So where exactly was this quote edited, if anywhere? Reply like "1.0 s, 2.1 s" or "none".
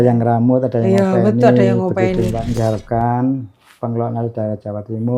2.6 s